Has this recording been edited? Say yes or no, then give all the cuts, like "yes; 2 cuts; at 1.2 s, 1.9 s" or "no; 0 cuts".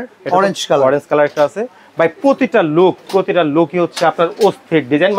no; 0 cuts